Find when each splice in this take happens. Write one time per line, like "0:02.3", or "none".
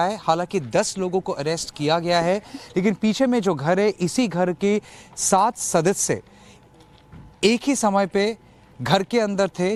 none